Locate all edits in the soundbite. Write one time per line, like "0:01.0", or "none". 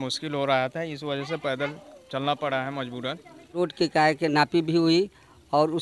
0:03.5